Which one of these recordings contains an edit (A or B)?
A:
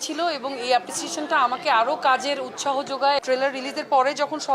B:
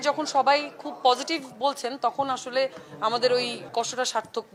A